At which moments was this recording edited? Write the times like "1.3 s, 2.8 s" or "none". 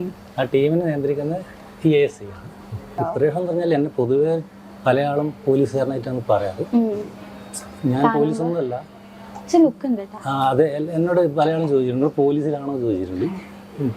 2.9 s